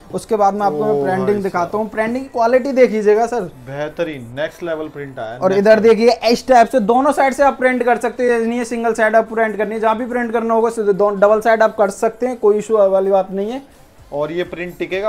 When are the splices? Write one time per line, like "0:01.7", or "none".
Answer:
none